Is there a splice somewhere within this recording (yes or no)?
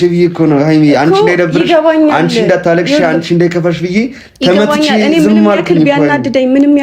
no